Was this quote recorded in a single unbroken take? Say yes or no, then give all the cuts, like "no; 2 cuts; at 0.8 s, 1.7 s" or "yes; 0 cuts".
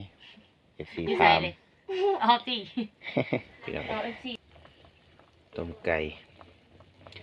no; 1 cut; at 4.4 s